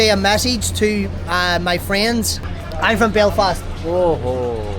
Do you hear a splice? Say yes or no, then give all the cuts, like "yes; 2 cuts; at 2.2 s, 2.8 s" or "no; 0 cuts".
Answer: yes; 1 cut; at 2.5 s